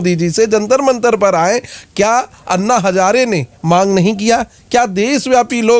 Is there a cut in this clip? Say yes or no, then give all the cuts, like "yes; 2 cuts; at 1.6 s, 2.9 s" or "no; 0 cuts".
no; 0 cuts